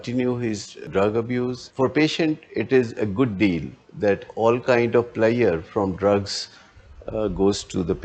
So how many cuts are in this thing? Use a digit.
1